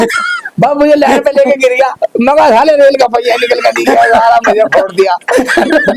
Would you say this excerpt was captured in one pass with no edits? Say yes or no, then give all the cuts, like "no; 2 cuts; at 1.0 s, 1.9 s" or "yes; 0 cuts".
yes; 0 cuts